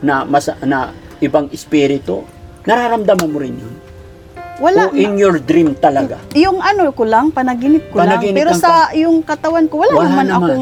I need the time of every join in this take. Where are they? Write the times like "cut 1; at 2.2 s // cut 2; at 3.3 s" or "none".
none